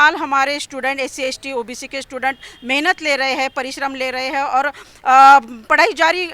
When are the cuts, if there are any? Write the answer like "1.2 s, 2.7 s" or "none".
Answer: none